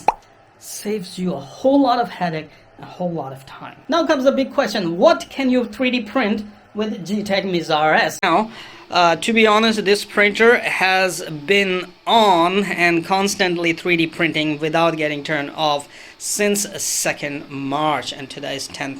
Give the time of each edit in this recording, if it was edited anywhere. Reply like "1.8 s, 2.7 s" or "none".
3.7 s, 8.2 s